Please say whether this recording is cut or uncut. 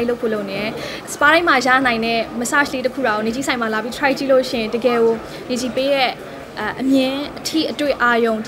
cut